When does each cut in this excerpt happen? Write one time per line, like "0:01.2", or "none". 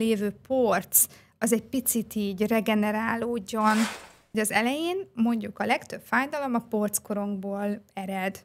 0:03.9